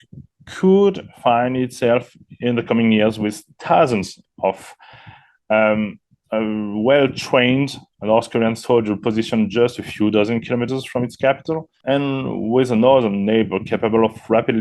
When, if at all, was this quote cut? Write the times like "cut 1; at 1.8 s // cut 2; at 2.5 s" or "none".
cut 1; at 11.7 s